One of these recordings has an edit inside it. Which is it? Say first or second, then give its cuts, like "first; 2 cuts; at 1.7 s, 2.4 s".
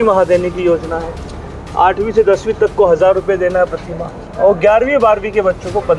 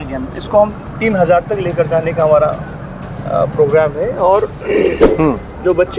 second; 1 cut; at 5.1 s